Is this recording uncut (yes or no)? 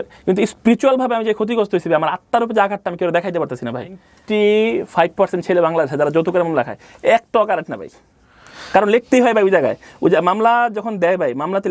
no